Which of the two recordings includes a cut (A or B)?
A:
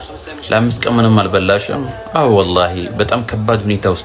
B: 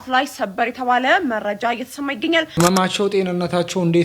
B